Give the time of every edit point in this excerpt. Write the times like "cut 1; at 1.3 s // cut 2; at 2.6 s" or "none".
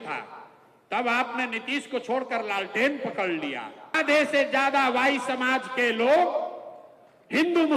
cut 1; at 3.9 s